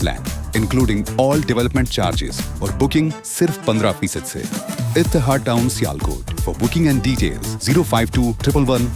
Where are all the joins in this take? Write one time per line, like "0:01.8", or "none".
none